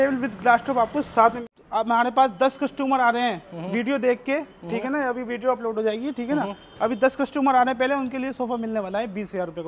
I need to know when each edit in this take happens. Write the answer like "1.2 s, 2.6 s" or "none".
1.5 s